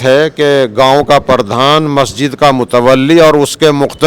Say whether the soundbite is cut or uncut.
uncut